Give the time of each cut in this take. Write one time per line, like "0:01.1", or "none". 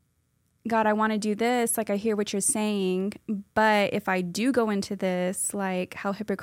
none